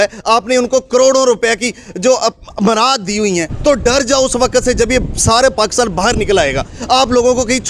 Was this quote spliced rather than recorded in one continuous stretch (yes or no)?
yes